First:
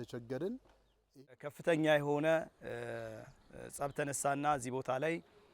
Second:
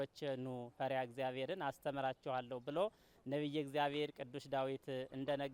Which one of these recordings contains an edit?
first; 1 cut; at 1.3 s

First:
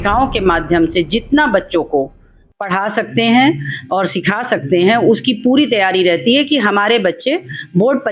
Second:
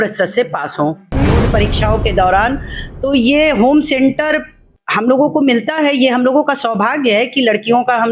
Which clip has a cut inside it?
second; 1 cut; at 1.4 s

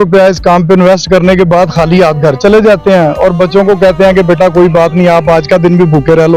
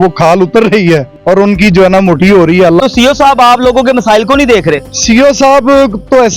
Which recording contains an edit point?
second; 3 cuts; at 1.1 s, 2.8 s, 4.9 s

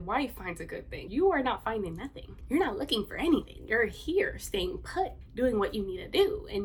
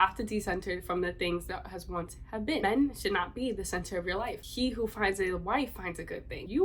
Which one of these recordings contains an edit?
second; 2 cuts; at 2.6 s, 4.4 s

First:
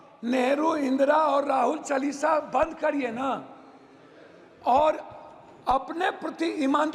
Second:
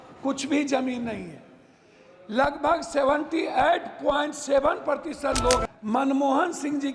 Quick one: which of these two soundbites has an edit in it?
second; 1 cut; at 5.7 s

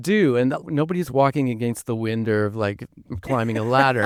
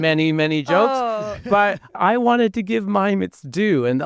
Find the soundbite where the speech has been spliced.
second; 1 cut; at 2.0 s

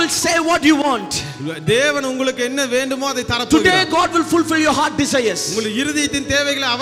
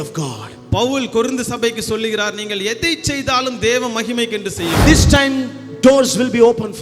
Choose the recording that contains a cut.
second; 1 cut; at 4.8 s

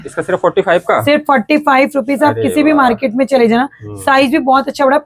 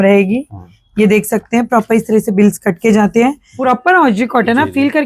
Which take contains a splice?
second; 1 cut; at 3.5 s

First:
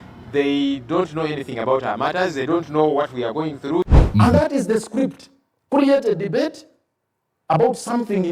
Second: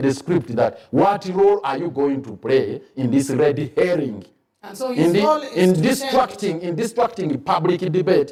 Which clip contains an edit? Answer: first; 1 cut; at 3.9 s

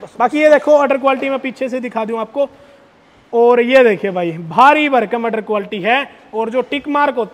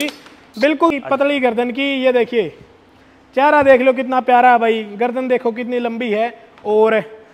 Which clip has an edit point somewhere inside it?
second; 1 cut; at 0.9 s

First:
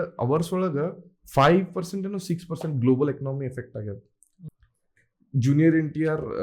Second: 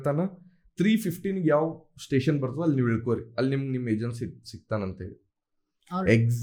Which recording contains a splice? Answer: first; 2 cuts; at 1.1 s, 4.4 s

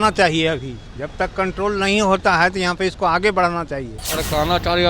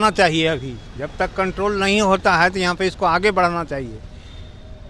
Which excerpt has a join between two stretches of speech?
first; 1 cut; at 4.0 s

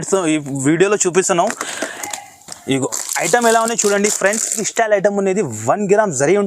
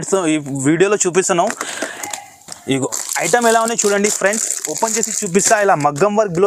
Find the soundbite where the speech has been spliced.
first; 1 cut; at 4.6 s

